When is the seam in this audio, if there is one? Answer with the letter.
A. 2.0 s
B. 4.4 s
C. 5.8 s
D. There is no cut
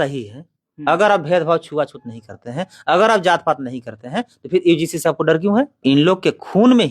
C